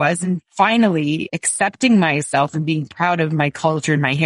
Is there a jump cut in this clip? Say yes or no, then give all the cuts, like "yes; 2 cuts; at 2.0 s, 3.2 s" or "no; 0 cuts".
no; 0 cuts